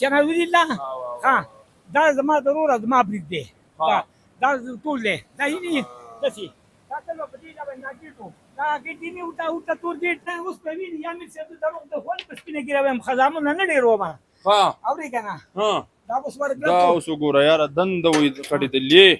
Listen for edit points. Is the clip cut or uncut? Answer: cut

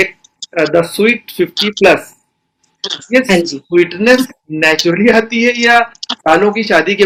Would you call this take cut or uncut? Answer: uncut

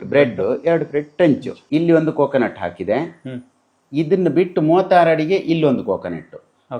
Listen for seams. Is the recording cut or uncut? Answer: cut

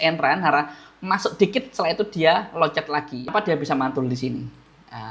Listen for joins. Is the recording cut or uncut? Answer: cut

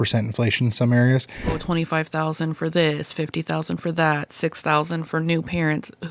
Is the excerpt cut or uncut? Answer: cut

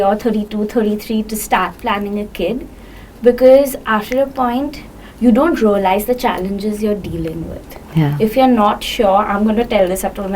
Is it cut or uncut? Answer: uncut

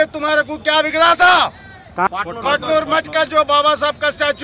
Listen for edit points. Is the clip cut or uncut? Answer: cut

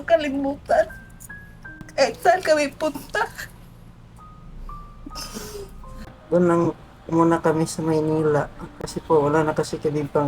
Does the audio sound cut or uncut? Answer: cut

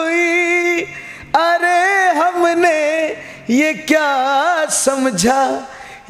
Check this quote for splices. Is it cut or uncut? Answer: uncut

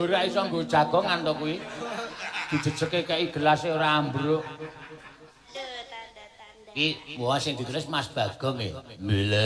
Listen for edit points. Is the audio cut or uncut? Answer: cut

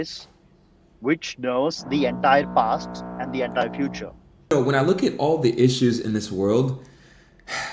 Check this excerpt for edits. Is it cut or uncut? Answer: cut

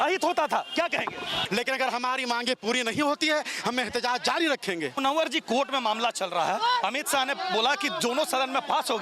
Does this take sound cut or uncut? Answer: cut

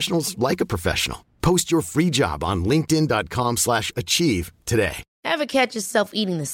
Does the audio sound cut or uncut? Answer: uncut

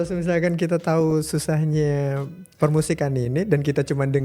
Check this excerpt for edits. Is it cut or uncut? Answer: uncut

